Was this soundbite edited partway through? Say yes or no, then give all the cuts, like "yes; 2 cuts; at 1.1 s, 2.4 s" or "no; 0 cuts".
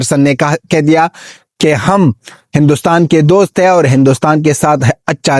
no; 0 cuts